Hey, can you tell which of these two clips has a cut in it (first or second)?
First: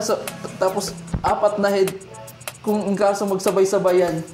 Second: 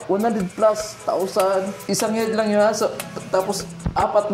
second